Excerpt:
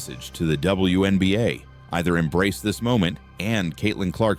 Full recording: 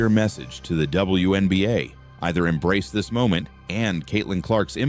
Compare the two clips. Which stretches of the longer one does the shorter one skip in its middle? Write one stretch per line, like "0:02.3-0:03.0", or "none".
none